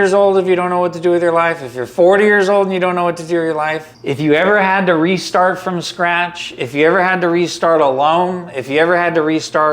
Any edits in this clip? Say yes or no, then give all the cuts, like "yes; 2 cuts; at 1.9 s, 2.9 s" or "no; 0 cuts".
yes; 1 cut; at 3.9 s